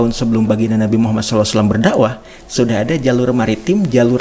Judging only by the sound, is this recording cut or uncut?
uncut